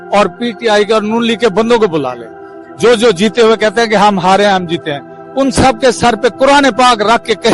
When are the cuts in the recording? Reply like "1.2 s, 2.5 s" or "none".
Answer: none